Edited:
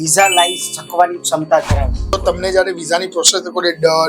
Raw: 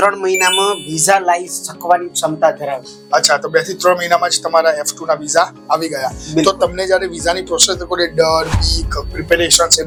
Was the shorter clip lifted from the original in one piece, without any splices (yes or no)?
no